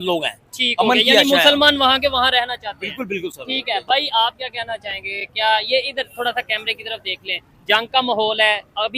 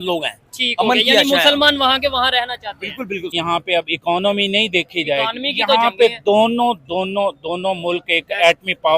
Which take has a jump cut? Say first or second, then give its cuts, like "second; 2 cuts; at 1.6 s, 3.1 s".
second; 1 cut; at 3.4 s